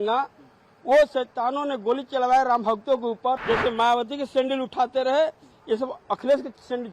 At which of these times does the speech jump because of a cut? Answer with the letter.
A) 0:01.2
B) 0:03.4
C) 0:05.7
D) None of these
B